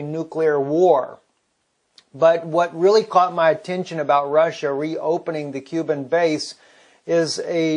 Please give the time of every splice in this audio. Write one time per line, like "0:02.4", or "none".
0:05.1